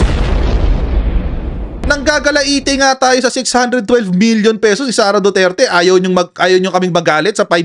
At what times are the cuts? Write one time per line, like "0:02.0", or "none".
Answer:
0:01.8